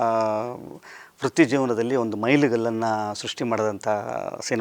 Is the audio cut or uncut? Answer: uncut